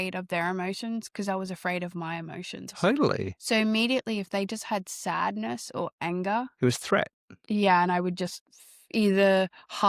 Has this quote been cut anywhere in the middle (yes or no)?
no